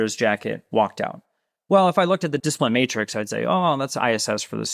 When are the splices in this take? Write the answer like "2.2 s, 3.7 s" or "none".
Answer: none